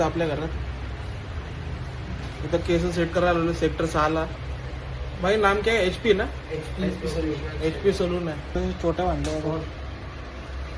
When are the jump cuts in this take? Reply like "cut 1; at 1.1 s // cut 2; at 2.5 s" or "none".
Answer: cut 1; at 8.4 s